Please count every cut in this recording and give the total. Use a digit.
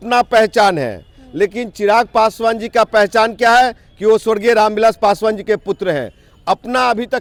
0